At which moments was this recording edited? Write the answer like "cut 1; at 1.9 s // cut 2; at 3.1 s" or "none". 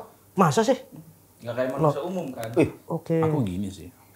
cut 1; at 2.8 s